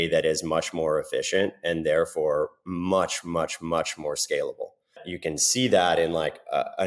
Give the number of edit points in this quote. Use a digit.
1